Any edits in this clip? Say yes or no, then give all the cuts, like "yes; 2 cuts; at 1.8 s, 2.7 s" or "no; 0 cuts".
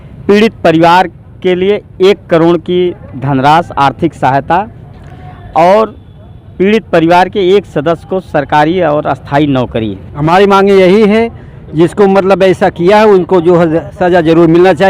yes; 1 cut; at 10.1 s